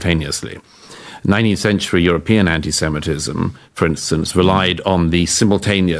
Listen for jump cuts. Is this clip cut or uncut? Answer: uncut